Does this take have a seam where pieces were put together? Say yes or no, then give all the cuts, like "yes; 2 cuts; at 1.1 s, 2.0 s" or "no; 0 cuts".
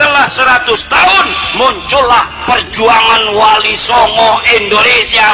no; 0 cuts